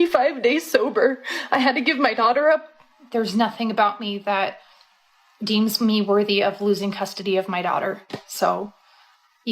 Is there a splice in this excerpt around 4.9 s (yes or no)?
no